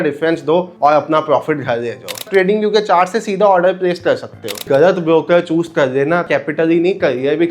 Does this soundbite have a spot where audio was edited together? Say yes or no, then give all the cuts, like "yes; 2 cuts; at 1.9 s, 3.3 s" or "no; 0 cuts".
yes; 3 cuts; at 2.2 s, 4.6 s, 6.3 s